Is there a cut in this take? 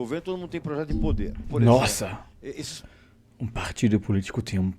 yes; 1 cut; at 1.5 s

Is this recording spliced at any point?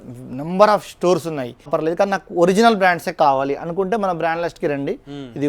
yes; 1 cut; at 1.7 s

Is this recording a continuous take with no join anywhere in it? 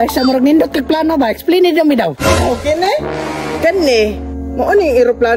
yes; 0 cuts

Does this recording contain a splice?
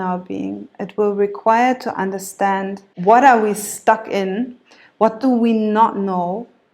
no; 0 cuts

